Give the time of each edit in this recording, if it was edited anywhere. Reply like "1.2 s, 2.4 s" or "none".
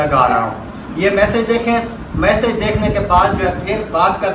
none